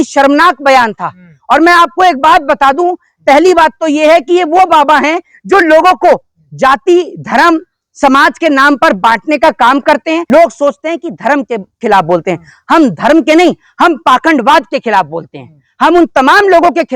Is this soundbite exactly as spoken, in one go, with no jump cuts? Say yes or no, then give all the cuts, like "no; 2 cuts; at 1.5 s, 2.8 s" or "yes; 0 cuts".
no; 1 cut; at 10.2 s